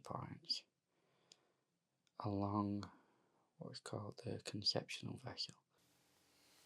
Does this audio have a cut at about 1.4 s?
no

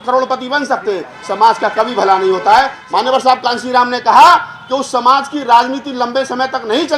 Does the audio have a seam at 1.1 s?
no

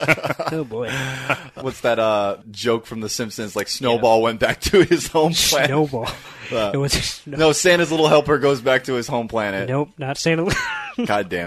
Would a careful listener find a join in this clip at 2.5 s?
yes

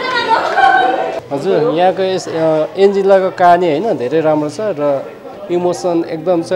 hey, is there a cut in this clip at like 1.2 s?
no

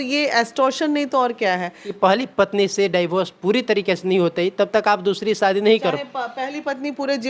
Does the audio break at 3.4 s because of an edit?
no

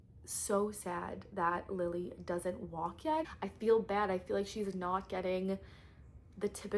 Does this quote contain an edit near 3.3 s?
yes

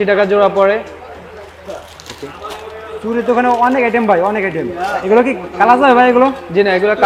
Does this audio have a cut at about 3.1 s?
no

